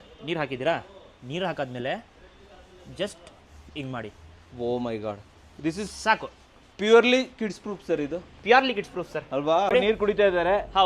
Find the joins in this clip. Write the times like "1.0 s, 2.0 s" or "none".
9.7 s